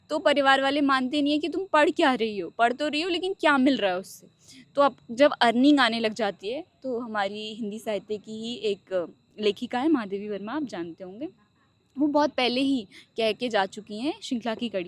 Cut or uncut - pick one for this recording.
uncut